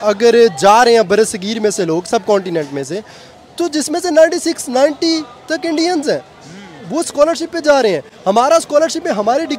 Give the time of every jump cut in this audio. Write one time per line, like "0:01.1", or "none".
none